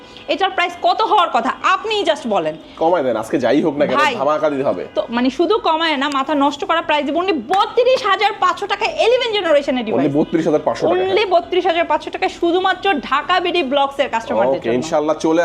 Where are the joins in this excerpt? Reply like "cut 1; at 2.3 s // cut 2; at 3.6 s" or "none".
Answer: none